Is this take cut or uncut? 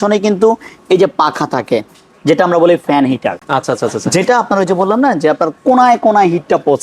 uncut